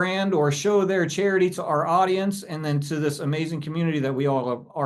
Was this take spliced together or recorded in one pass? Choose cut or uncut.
uncut